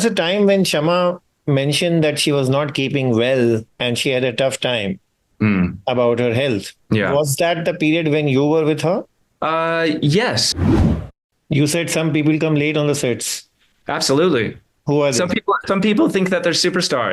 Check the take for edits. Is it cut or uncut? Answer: cut